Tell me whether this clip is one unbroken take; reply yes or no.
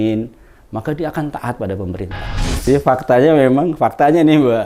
no